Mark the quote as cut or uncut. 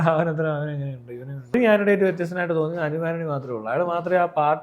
cut